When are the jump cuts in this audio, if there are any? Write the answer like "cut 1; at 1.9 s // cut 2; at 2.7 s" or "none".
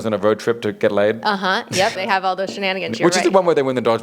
cut 1; at 2.1 s